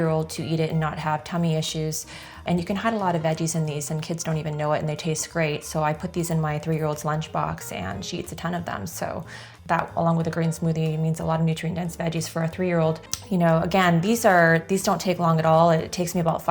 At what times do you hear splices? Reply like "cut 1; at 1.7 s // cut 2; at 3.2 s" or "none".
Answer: cut 1; at 2.4 s // cut 2; at 9.5 s // cut 3; at 13.1 s